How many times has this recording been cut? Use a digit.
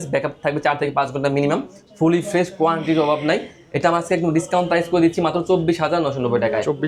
0